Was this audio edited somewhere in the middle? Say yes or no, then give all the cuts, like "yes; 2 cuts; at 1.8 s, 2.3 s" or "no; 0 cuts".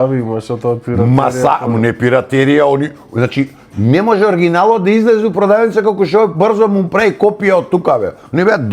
no; 0 cuts